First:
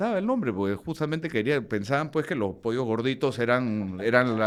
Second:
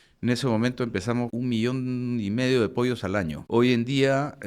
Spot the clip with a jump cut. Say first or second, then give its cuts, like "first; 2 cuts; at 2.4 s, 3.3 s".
second; 2 cuts; at 1.3 s, 3.4 s